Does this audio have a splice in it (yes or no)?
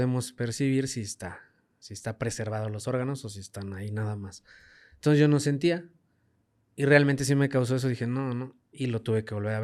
no